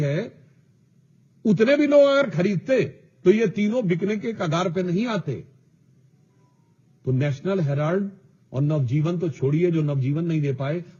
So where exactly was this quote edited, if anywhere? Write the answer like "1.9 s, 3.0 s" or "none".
none